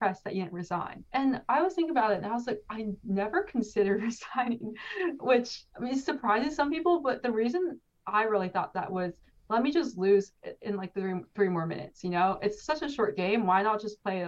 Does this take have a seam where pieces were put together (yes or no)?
no